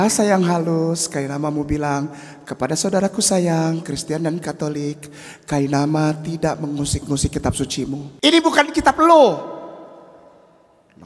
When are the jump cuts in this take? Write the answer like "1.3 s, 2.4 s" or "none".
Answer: 8.1 s